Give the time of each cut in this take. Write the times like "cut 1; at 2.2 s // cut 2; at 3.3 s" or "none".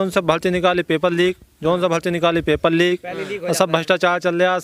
none